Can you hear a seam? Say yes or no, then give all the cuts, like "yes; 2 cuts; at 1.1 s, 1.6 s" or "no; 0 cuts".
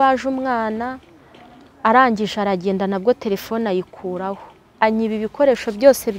no; 0 cuts